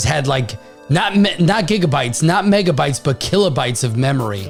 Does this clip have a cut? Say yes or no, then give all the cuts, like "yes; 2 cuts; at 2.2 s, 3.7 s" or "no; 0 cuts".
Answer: no; 0 cuts